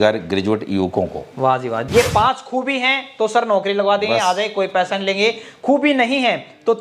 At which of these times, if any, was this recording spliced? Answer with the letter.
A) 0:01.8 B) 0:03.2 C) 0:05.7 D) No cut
A